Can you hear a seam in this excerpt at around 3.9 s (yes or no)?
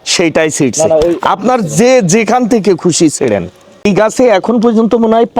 yes